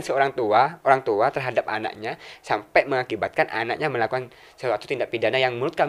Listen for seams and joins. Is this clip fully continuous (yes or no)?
yes